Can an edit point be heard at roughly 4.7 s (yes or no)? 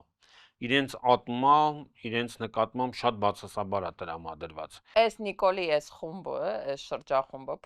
yes